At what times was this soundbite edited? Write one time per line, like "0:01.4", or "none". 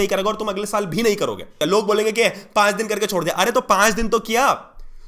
0:01.6